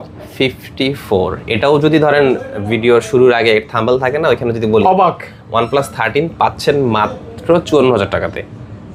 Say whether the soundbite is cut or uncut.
uncut